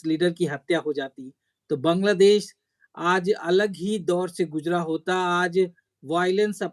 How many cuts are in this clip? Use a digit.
0